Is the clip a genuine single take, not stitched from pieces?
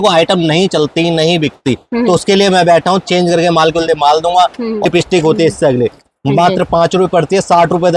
no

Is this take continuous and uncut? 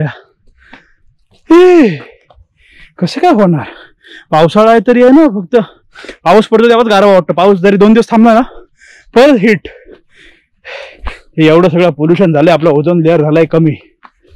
yes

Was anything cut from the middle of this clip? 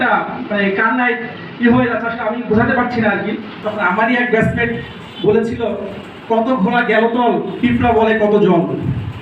yes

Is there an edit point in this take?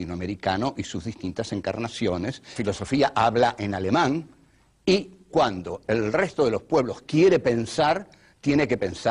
no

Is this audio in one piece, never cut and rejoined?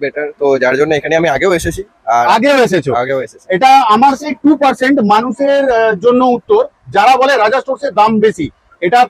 yes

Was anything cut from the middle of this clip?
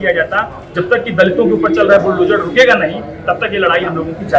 no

